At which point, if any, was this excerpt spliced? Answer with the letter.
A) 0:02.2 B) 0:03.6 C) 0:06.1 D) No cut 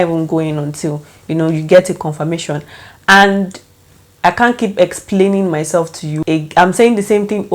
C